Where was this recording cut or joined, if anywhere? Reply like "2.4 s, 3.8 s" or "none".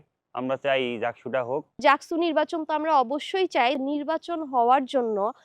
1.7 s, 3.8 s